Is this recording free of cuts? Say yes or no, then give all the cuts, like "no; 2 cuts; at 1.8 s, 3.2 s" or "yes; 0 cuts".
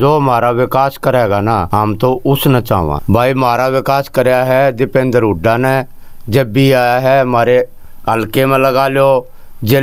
no; 2 cuts; at 1.7 s, 3.0 s